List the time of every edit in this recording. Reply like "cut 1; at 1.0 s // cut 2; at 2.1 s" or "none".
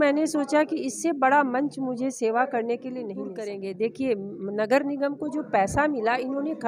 cut 1; at 3.2 s